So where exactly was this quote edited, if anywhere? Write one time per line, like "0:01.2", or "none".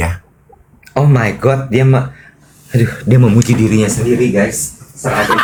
none